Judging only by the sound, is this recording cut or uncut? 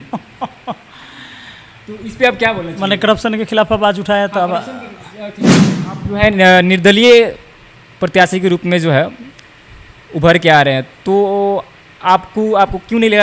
cut